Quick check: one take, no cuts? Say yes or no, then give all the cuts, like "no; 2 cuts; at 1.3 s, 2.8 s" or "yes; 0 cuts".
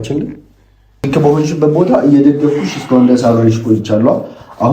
no; 1 cut; at 1.1 s